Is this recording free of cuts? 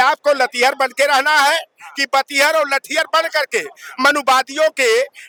yes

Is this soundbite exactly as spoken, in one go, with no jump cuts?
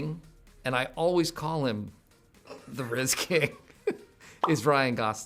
yes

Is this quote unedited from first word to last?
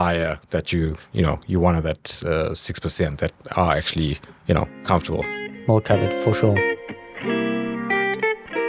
no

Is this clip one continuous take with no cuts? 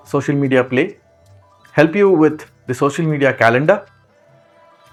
yes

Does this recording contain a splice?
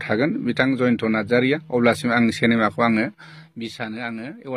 no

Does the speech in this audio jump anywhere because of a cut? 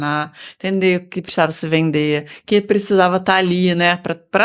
no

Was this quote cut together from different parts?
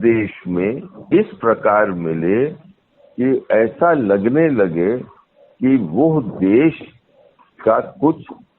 yes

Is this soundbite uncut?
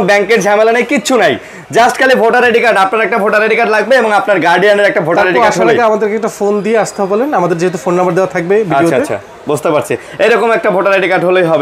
yes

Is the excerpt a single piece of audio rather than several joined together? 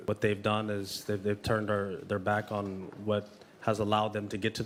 yes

